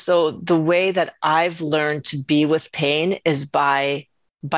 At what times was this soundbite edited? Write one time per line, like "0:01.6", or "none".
none